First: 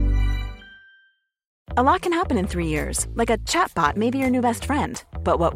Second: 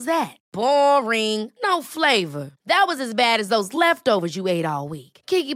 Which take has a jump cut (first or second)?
first